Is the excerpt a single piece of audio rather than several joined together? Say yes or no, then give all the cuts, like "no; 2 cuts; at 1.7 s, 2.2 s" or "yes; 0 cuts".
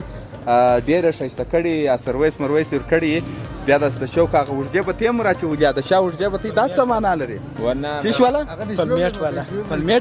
yes; 0 cuts